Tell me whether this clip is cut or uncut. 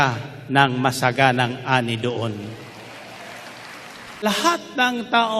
cut